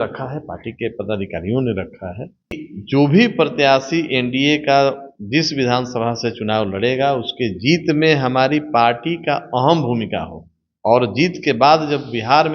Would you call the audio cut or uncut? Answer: cut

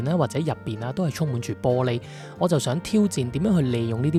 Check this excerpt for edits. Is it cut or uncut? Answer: uncut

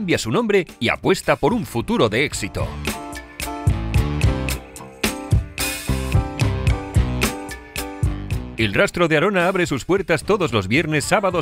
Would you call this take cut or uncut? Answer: uncut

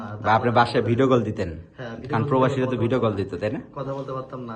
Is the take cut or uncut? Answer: uncut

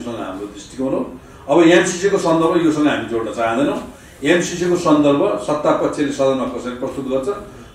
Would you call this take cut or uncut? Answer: uncut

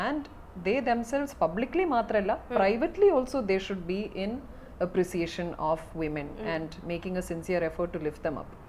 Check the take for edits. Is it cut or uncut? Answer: uncut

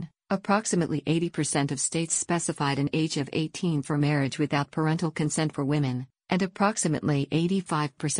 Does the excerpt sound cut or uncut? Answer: cut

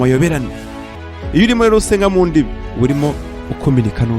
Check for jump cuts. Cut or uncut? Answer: cut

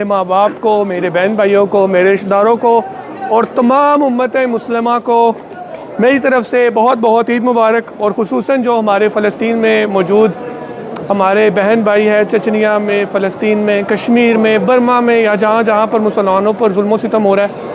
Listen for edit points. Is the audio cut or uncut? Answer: uncut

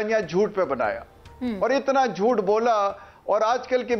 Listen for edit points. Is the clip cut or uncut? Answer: uncut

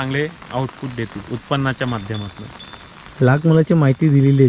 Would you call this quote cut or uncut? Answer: uncut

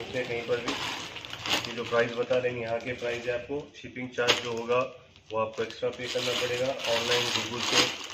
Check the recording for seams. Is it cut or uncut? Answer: uncut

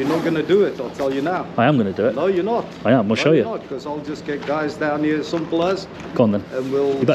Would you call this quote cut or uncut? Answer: uncut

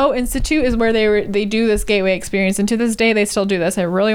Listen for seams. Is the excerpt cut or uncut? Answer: uncut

